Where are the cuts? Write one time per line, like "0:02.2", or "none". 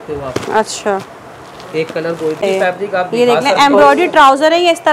0:02.4